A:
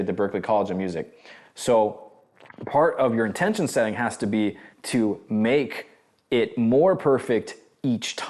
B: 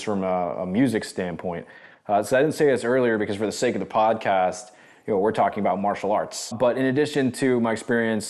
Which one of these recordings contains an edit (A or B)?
B